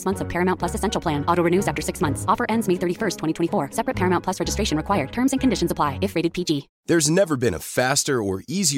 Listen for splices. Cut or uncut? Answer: cut